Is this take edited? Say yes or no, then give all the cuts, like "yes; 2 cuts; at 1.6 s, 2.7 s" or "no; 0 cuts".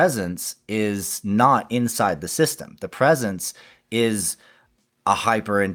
no; 0 cuts